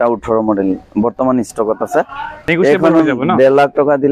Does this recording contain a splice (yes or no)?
yes